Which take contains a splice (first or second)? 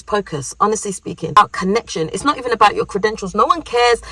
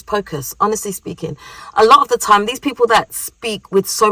first